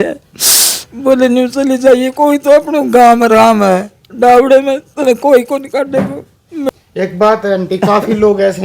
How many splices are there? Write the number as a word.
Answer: one